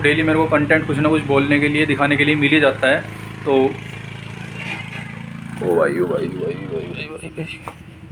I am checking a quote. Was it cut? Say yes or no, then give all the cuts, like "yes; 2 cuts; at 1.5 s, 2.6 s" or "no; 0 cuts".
no; 0 cuts